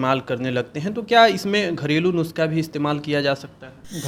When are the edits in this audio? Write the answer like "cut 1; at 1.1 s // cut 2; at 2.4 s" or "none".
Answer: none